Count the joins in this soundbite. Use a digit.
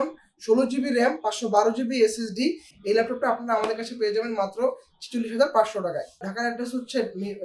2